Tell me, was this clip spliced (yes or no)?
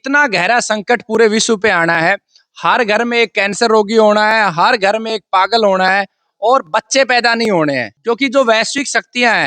yes